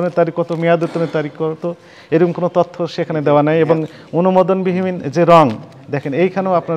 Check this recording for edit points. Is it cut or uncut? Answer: uncut